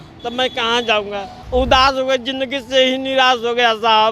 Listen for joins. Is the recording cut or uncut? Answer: cut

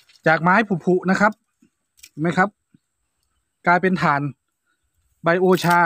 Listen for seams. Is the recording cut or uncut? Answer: uncut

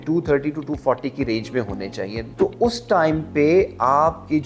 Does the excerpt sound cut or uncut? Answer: cut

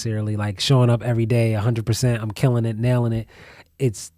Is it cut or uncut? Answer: uncut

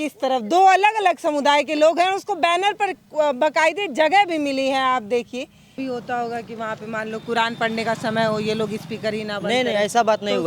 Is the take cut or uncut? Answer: cut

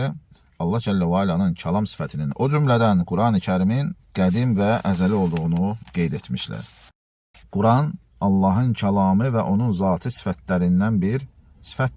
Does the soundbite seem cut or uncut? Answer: cut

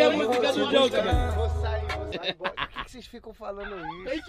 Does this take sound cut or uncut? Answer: cut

